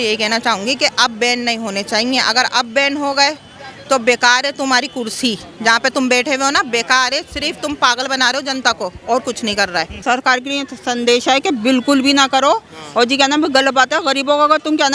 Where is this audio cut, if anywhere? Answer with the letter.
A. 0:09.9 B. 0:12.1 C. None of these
A